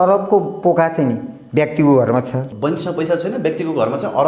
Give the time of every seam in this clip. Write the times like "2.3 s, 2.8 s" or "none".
2.5 s

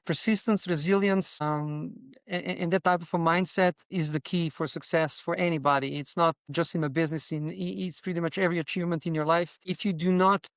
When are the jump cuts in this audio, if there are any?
9.6 s

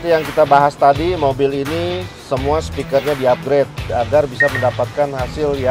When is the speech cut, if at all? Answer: 3.9 s

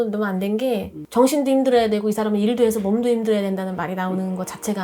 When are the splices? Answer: 1.0 s

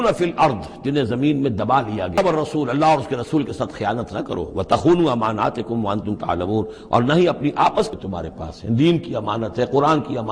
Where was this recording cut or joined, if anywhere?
2.2 s, 7.9 s

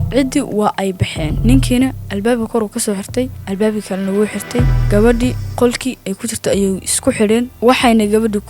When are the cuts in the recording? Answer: 7.5 s

